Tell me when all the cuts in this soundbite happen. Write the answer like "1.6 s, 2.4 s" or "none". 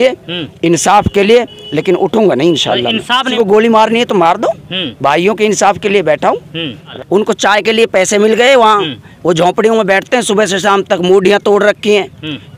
3.3 s, 6.9 s